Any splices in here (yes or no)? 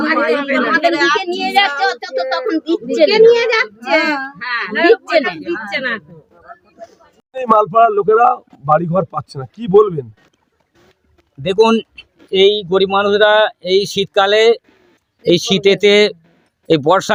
no